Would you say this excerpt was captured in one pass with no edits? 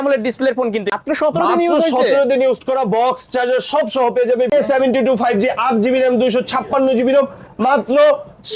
no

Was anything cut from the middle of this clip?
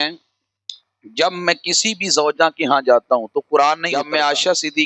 yes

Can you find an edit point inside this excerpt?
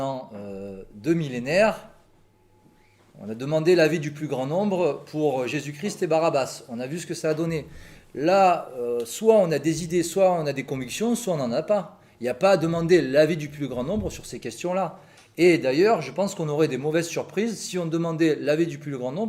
no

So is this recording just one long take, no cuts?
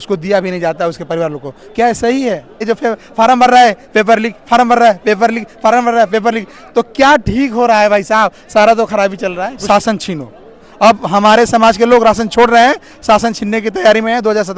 no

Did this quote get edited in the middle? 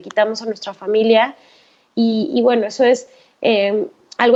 no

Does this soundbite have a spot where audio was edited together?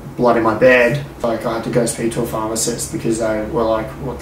yes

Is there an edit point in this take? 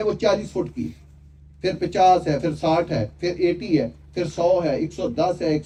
no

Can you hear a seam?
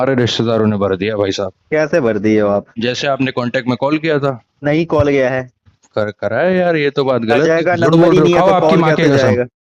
no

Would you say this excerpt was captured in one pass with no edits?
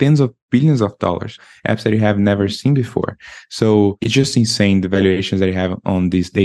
no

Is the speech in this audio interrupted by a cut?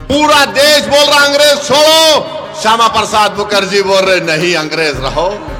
no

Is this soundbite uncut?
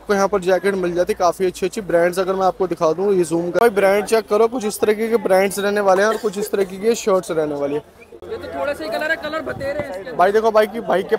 no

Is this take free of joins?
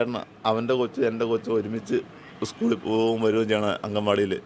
yes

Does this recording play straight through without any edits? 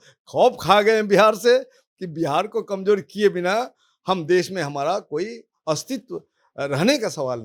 yes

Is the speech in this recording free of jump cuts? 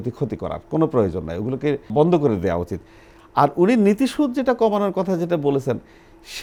yes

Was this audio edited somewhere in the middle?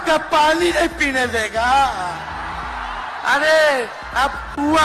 no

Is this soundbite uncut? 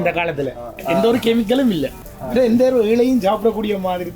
no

